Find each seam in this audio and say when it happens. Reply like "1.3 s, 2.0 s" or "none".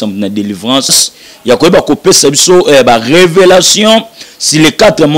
1.1 s